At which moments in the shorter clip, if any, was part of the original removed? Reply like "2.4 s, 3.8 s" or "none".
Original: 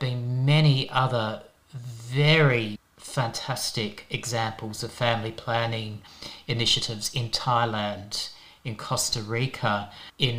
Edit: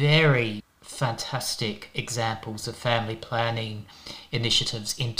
none